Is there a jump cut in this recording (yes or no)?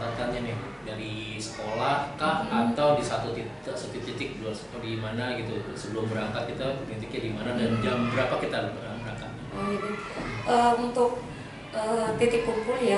no